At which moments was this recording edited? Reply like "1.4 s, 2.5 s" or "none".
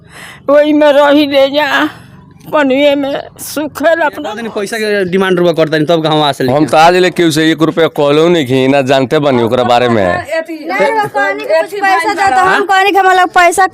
4.6 s